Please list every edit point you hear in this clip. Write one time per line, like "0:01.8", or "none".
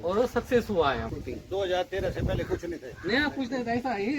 0:01.1